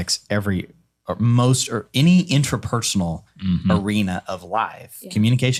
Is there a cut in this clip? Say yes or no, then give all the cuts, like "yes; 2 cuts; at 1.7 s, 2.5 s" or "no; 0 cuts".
no; 0 cuts